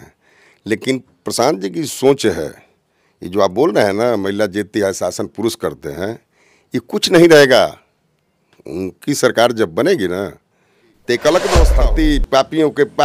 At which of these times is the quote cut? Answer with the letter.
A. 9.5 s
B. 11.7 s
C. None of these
B